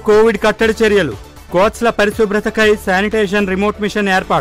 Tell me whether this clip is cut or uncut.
uncut